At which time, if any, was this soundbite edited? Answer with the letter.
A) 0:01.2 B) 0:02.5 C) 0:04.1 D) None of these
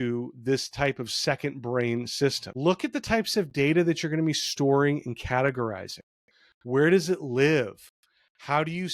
B